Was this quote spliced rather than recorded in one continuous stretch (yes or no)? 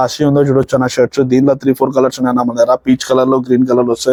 no